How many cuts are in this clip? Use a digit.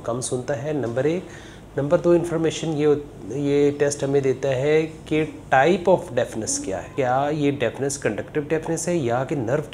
1